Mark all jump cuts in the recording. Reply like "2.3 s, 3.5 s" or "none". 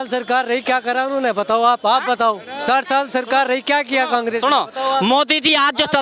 none